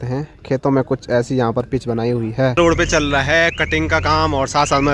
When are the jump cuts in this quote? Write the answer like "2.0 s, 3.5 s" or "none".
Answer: 2.6 s